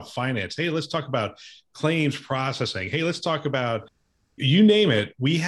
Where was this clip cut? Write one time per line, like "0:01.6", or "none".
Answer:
0:04.4